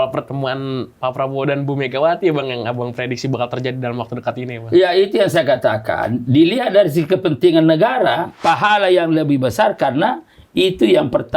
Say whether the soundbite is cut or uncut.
cut